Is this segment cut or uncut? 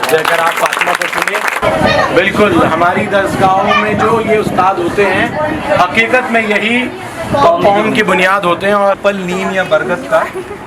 cut